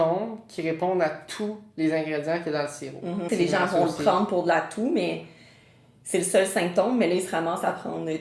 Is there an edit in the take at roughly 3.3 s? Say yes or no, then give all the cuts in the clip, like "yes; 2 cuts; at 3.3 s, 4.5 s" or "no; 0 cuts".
yes; 1 cut; at 3.3 s